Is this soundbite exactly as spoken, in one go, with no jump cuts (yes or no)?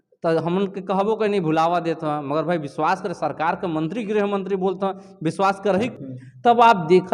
no